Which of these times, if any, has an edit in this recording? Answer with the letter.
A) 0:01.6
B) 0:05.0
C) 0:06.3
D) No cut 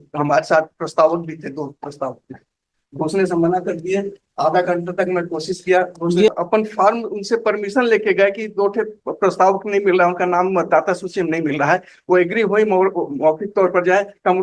C